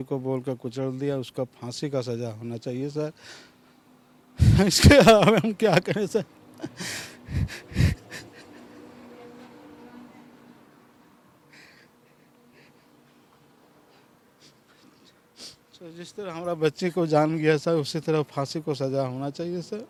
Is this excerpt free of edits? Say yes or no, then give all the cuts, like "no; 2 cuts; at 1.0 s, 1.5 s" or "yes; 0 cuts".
yes; 0 cuts